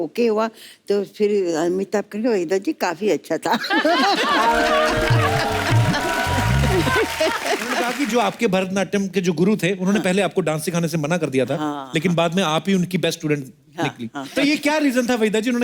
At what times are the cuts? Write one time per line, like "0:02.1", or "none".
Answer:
0:07.9
0:14.2